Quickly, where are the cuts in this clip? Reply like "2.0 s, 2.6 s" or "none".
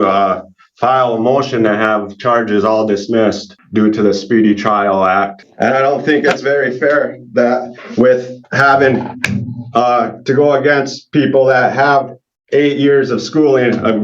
3.5 s, 5.4 s